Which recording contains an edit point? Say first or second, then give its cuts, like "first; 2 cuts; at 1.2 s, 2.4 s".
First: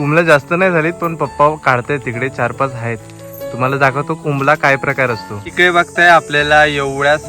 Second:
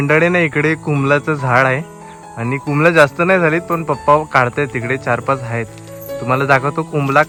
first; 1 cut; at 5.5 s